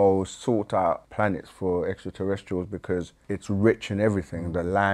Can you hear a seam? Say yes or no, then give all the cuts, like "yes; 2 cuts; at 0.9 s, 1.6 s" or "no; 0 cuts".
yes; 2 cuts; at 1.1 s, 3.2 s